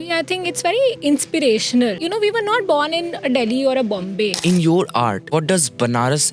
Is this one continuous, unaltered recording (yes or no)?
no